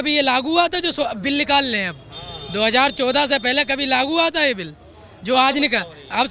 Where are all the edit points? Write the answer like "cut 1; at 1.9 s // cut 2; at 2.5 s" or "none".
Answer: none